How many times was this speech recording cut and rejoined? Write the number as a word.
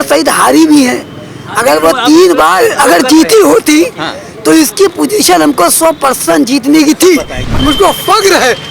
one